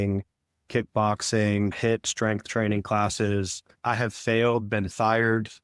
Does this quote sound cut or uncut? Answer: cut